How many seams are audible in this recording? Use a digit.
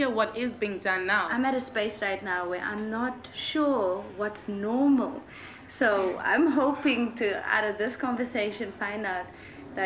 1